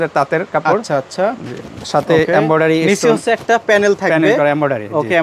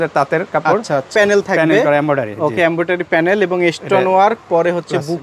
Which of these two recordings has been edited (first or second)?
second